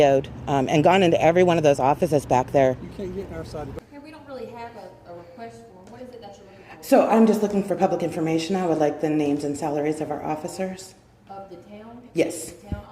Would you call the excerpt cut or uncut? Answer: cut